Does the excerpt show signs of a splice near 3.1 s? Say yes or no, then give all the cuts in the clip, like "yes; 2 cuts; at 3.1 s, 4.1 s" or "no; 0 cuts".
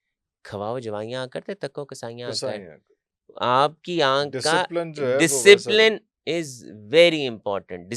no; 0 cuts